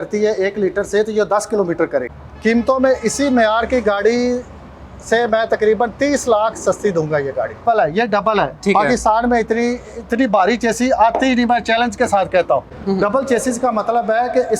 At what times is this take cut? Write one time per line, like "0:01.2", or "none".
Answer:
0:02.2
0:07.6
0:12.7